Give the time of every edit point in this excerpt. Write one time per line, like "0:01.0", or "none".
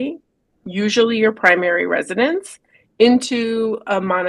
none

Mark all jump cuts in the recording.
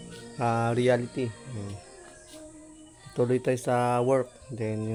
none

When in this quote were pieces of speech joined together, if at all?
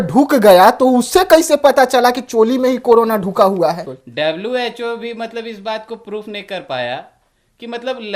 0:04.0

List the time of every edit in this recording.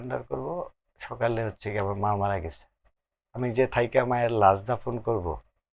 none

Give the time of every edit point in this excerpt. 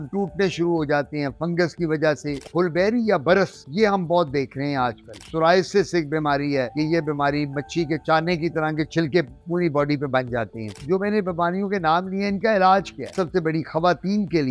0:02.4
0:05.1
0:06.7
0:10.8
0:13.1

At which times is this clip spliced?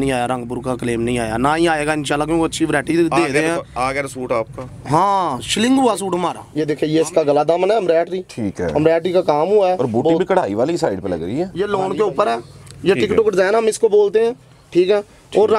0:06.5
0:11.5

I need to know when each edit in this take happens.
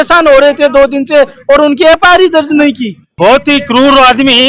0:03.0

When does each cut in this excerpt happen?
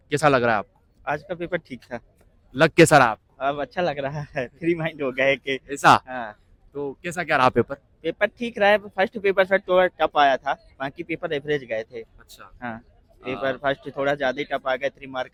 none

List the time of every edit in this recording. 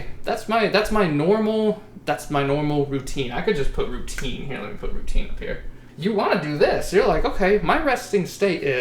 0:05.8

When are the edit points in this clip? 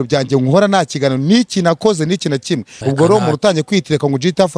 0:02.7

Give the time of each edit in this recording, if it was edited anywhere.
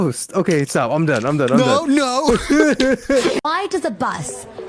0:03.4

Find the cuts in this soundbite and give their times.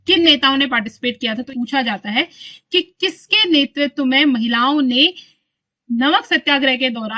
0:01.5

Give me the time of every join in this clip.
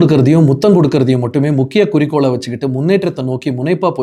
none

